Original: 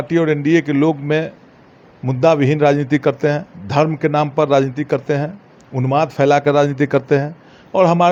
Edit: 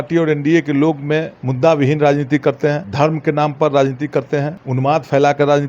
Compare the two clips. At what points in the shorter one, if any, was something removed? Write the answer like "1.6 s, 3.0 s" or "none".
1.4 s, 2.8 s, 4.6 s